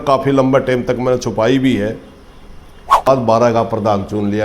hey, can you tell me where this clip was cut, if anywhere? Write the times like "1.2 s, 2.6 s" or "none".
3.1 s